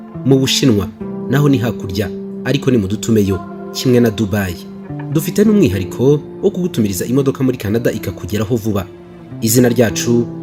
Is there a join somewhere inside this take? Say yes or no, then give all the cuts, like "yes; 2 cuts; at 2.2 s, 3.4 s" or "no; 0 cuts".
no; 0 cuts